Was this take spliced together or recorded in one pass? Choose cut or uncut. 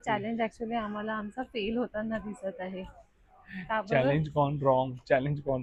uncut